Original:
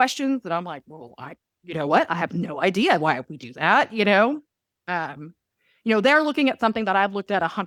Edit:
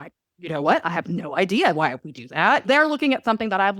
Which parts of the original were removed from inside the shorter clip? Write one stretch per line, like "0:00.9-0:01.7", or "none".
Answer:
0:03.9-0:06.0